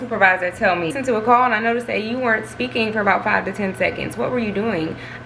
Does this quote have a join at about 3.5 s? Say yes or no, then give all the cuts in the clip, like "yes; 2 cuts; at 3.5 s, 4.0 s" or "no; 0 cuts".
no; 1 cut; at 0.9 s